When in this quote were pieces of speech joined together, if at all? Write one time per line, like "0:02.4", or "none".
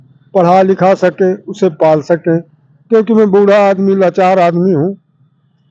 none